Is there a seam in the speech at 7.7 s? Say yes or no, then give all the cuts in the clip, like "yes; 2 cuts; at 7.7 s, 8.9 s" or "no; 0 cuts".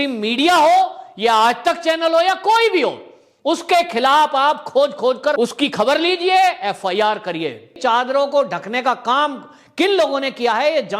yes; 1 cut; at 7.7 s